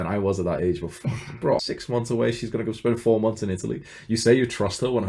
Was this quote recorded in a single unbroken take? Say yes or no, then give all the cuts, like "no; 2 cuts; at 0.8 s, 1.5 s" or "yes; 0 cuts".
no; 1 cut; at 1.6 s